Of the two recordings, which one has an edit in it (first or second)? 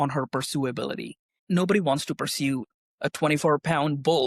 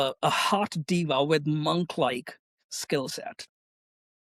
first